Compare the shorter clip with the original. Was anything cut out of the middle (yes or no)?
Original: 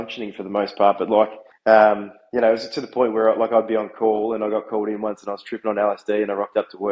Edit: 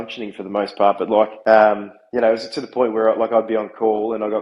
yes